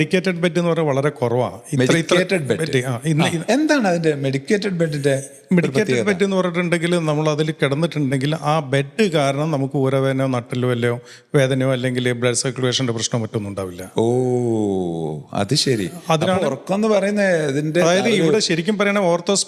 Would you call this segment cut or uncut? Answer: uncut